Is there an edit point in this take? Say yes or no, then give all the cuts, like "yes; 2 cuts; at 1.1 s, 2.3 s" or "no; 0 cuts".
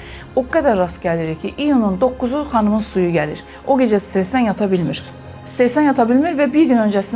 no; 0 cuts